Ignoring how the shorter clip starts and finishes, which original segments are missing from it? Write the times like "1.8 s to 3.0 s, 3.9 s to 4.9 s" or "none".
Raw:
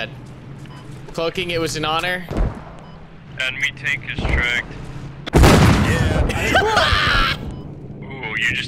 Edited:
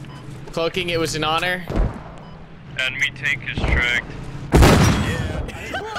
5.1 s to 5.3 s